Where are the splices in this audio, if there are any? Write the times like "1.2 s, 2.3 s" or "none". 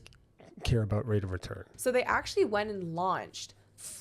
1.7 s